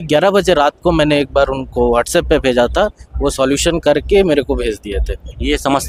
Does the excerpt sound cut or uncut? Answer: uncut